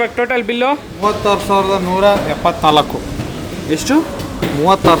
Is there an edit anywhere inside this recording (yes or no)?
no